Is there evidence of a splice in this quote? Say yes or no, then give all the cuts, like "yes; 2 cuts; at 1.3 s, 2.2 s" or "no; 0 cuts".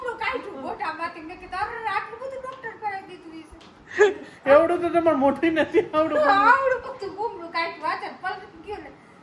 no; 0 cuts